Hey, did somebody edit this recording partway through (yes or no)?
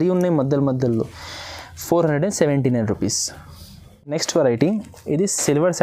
no